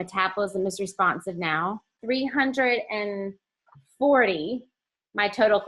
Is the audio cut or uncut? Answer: cut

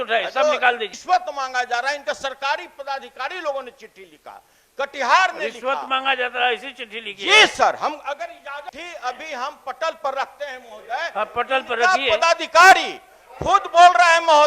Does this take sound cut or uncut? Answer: cut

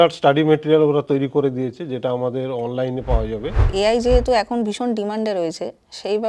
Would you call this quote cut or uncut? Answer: cut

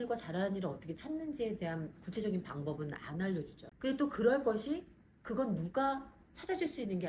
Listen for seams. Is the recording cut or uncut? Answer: cut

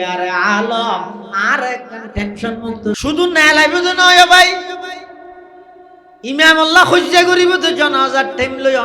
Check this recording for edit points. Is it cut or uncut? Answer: cut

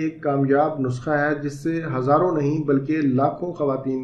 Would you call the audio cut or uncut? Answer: uncut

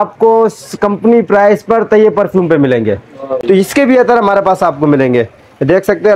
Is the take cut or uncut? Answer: cut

